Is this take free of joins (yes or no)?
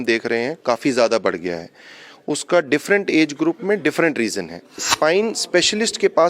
no